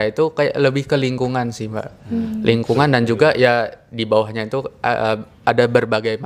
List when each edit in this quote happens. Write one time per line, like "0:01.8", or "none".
none